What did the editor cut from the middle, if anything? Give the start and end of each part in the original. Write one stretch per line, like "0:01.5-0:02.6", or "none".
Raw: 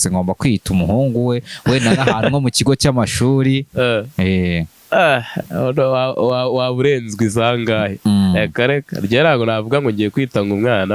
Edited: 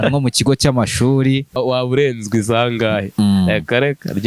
0:03.7-0:06.4